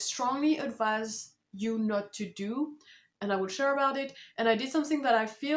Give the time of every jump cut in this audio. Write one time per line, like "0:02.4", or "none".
none